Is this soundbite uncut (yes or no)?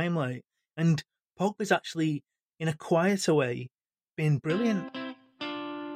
no